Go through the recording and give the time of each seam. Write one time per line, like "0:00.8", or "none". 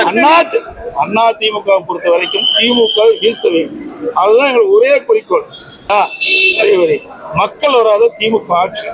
0:05.9